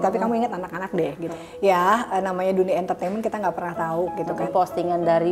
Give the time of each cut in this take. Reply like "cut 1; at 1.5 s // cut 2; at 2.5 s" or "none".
cut 1; at 1.3 s // cut 2; at 4.5 s